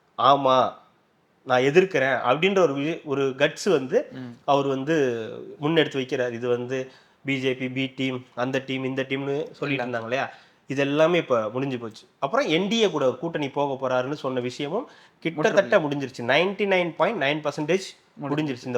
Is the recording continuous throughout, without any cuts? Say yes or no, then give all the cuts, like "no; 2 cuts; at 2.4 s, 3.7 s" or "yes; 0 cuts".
yes; 0 cuts